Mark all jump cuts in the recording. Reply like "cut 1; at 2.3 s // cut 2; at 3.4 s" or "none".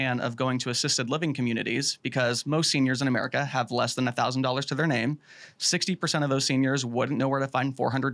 none

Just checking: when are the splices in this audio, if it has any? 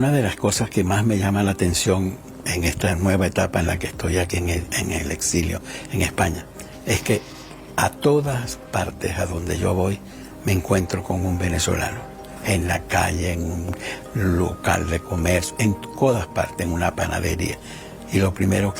none

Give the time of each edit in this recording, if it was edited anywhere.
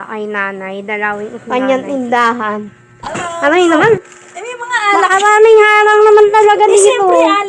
cut 1; at 1.3 s // cut 2; at 3.2 s

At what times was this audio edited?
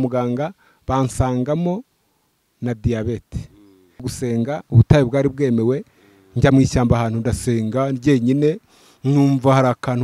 cut 1; at 4.1 s

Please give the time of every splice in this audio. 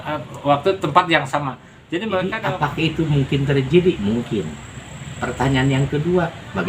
cut 1; at 2.3 s

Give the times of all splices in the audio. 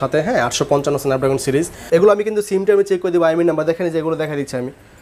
cut 1; at 1.8 s

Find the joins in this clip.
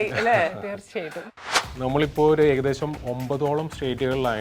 cut 1; at 1.2 s

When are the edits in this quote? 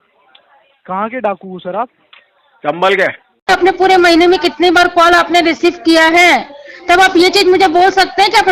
cut 1; at 3.3 s

